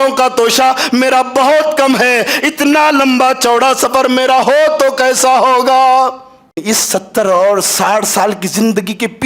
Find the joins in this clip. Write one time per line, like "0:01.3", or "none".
0:06.6